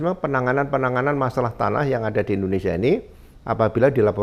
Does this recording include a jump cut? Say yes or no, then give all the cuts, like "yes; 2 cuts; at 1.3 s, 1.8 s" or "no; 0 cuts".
no; 0 cuts